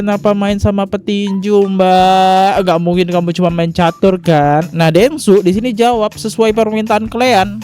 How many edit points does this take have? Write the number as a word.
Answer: one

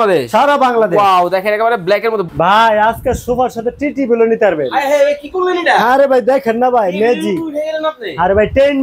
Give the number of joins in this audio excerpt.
one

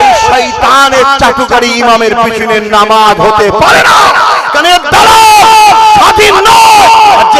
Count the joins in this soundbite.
zero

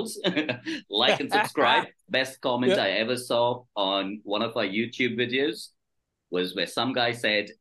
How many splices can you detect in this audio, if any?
one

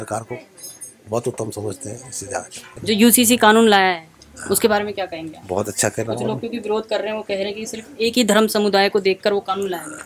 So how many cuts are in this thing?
one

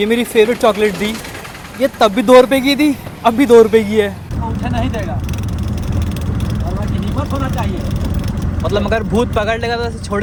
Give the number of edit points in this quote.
zero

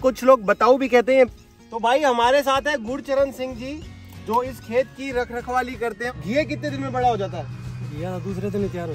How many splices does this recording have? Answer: two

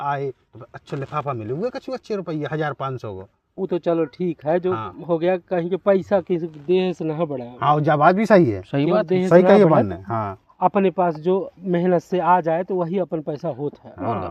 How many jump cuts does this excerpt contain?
zero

